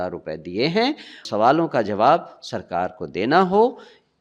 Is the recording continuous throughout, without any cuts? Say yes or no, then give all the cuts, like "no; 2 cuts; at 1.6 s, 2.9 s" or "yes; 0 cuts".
no; 1 cut; at 1.2 s